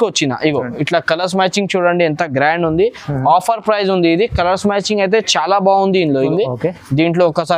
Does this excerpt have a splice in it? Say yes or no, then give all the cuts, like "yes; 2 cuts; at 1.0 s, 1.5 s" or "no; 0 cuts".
yes; 1 cut; at 6.3 s